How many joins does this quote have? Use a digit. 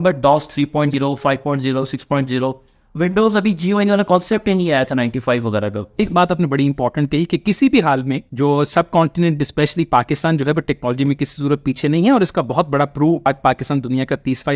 4